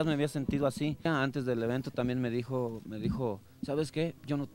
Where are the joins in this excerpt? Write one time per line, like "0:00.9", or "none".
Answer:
0:01.1